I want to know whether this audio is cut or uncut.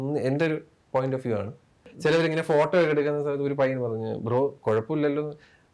cut